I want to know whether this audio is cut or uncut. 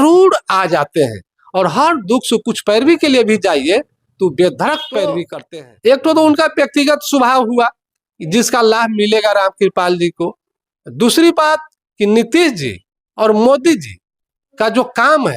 cut